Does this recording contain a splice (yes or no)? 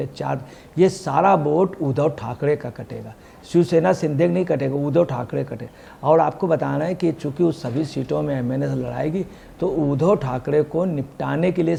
no